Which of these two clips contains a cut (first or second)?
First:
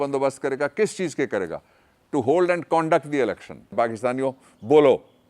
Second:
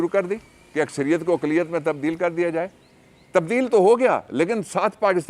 first